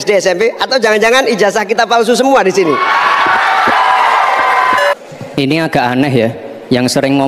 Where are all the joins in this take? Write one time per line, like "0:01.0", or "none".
0:04.9